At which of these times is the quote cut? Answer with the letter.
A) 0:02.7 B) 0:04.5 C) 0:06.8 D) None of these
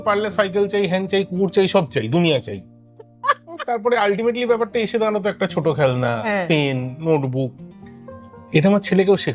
D